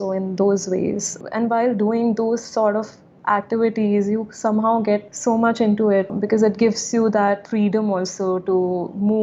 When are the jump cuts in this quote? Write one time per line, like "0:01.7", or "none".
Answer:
0:01.2
0:05.1
0:06.1